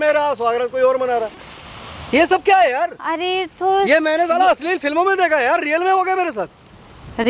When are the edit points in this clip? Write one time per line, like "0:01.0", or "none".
none

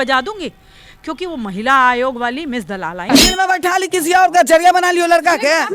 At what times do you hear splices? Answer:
0:03.0

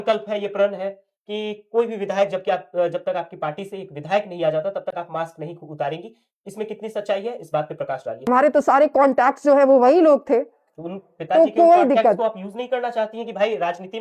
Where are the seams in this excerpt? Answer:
0:08.3

